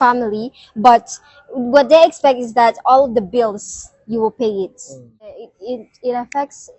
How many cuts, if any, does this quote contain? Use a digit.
1